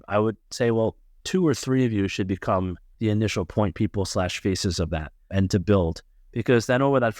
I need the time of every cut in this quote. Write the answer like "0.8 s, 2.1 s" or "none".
1.1 s, 2.8 s, 5.2 s

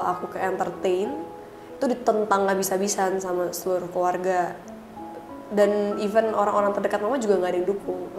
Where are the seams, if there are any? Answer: none

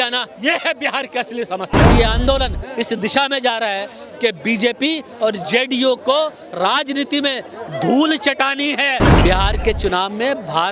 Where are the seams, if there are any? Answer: 1.9 s, 9.1 s

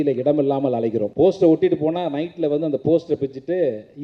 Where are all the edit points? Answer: 1.1 s

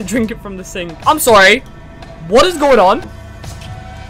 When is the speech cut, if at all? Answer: 3.1 s

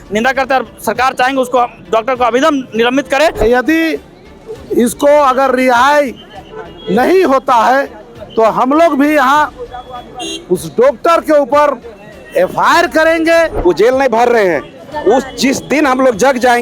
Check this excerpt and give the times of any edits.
3.4 s, 13.5 s

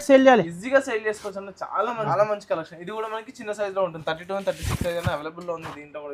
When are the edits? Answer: 2.1 s

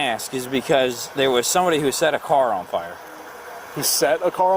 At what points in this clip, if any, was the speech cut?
none

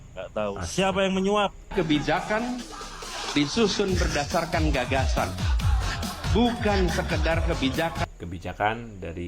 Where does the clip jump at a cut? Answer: 1.7 s

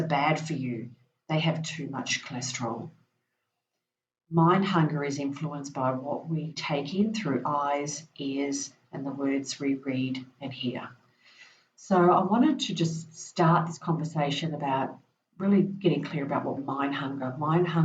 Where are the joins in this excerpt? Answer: 16.6 s

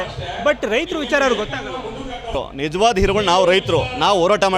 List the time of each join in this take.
2.4 s

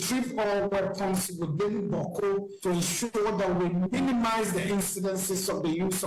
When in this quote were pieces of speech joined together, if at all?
2.5 s

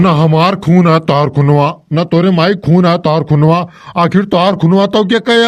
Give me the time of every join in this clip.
none

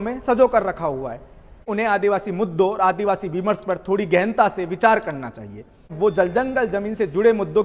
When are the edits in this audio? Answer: 1.7 s, 5.9 s

